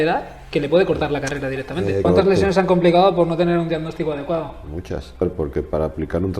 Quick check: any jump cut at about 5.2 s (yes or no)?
yes